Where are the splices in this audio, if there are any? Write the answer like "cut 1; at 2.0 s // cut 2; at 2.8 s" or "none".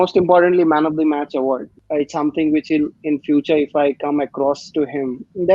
cut 1; at 1.7 s